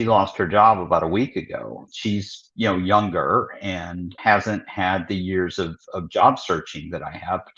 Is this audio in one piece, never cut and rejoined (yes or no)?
no